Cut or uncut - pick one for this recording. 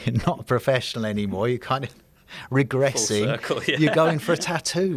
uncut